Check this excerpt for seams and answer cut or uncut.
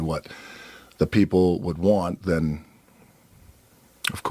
uncut